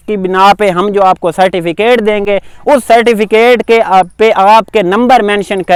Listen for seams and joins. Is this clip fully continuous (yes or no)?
yes